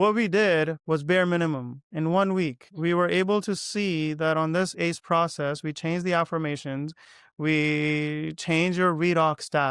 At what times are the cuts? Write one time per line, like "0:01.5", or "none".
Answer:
0:02.6

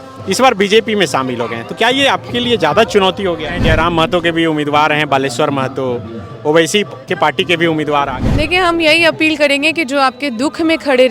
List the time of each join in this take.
0:03.6
0:08.2

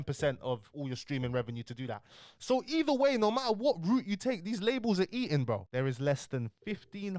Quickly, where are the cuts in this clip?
0:05.6

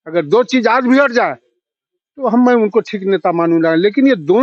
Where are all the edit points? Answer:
none

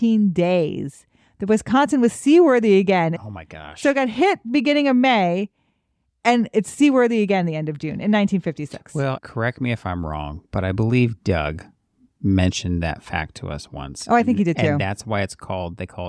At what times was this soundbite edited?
0:03.1
0:09.2

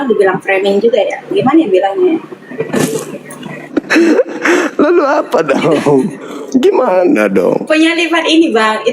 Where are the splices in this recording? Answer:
0:03.7

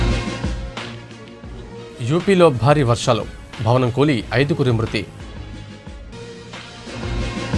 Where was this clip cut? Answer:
none

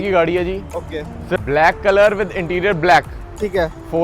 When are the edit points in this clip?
0:01.4

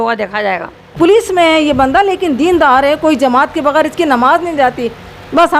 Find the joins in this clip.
0:00.9

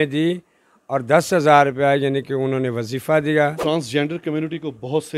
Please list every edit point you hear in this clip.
0:03.6

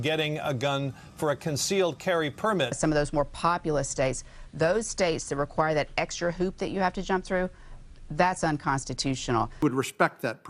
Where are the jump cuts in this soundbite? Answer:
0:02.7
0:09.5

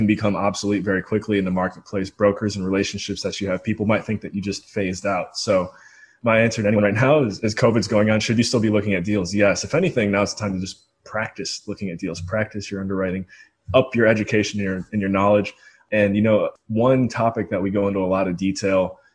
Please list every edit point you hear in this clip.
none

